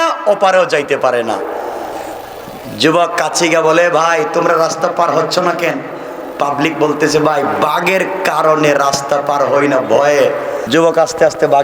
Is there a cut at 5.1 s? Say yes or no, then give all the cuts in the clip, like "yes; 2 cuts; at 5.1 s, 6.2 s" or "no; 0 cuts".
no; 1 cut; at 10.6 s